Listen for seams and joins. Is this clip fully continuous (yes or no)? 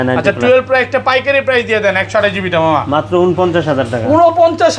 yes